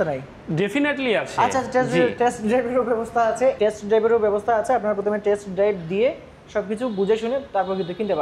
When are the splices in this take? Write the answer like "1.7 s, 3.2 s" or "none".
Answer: 3.6 s